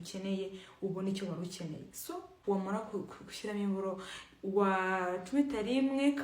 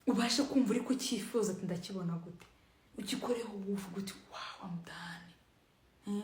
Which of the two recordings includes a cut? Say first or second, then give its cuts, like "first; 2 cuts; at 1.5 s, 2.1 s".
first; 1 cut; at 2.3 s